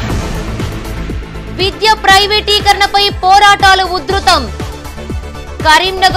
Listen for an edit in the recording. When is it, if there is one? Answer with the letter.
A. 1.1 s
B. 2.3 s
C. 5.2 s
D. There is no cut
D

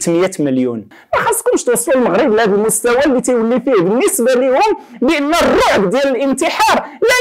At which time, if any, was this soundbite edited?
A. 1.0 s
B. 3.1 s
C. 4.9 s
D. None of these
A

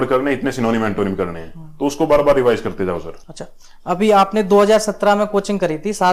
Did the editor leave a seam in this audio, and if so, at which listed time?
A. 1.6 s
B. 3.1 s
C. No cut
C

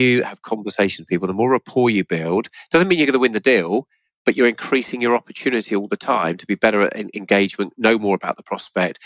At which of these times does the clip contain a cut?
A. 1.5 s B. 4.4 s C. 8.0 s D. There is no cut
D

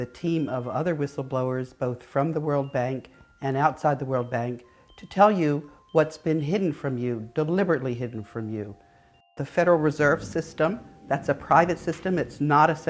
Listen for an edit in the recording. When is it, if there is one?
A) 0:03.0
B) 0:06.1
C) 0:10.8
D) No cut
B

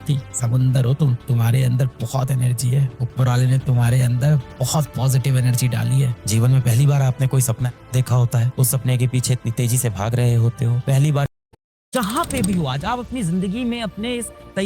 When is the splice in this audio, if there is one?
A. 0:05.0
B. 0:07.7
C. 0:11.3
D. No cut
C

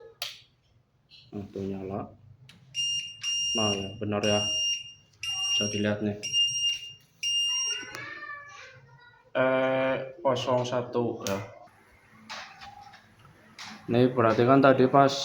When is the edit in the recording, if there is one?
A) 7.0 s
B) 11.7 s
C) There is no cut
B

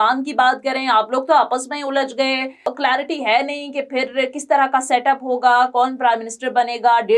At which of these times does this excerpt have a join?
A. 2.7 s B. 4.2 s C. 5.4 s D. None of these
A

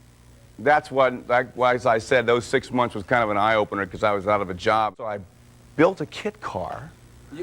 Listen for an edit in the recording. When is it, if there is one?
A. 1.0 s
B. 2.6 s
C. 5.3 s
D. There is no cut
C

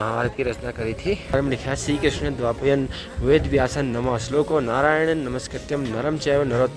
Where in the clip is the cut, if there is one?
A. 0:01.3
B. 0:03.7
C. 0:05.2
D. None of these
A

